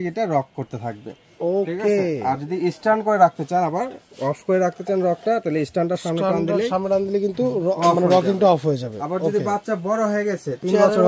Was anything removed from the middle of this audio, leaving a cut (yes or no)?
no